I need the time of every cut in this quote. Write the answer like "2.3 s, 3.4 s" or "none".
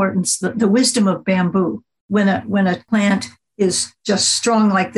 2.0 s, 2.8 s, 3.9 s